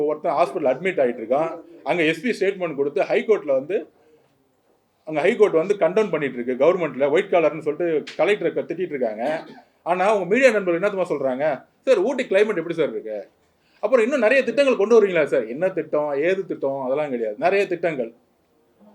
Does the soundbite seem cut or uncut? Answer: uncut